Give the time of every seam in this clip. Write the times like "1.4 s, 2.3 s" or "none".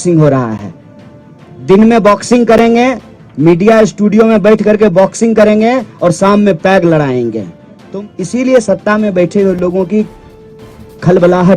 7.8 s